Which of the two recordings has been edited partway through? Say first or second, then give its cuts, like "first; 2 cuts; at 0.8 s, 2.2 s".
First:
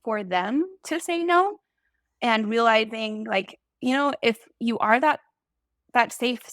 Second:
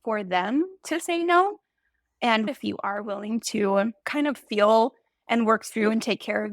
second; 1 cut; at 2.5 s